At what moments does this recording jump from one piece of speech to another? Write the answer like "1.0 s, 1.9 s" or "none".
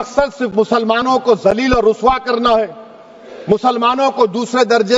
none